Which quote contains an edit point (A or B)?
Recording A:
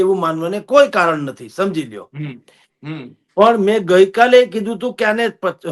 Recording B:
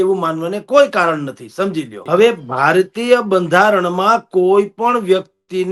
B